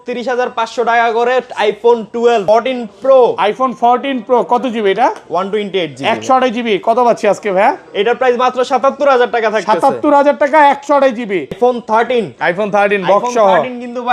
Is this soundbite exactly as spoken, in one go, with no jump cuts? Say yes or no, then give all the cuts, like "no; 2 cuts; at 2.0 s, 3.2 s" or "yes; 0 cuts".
no; 2 cuts; at 2.4 s, 11.6 s